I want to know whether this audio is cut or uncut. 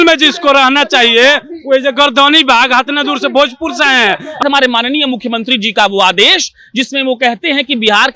cut